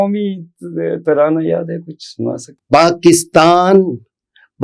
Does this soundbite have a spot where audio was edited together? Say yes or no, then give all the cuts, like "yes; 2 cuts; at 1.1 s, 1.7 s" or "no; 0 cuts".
yes; 1 cut; at 2.5 s